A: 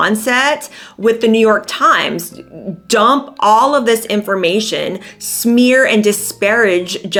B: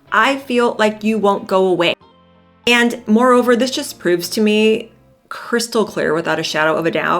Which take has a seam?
B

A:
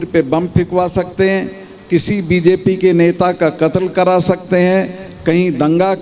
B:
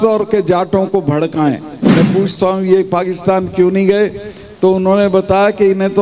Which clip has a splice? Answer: B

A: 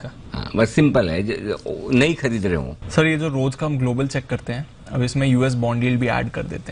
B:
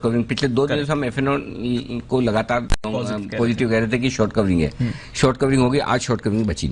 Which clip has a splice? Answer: A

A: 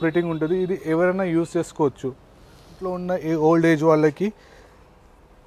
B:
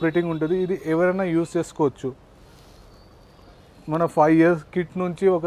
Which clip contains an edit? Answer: A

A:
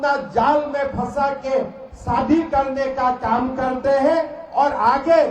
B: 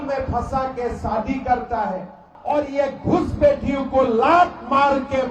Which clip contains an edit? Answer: B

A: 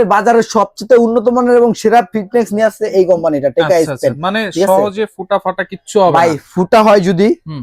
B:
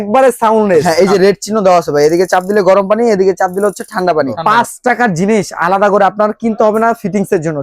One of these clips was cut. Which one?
B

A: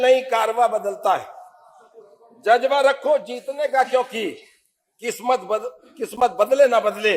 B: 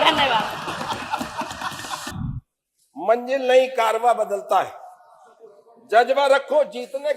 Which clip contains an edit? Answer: B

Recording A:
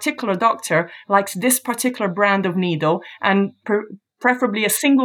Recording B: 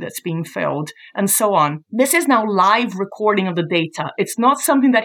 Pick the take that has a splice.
B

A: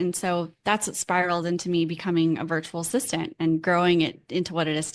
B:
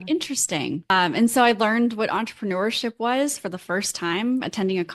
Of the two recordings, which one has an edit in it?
B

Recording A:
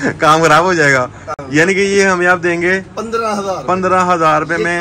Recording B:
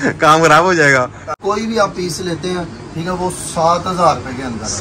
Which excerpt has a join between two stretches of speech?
B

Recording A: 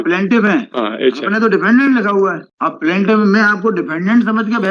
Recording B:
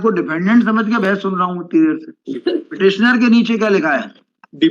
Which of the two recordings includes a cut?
B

